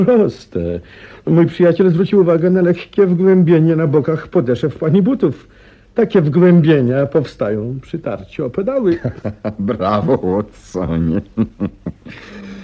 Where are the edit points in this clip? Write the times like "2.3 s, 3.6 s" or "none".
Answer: 7.3 s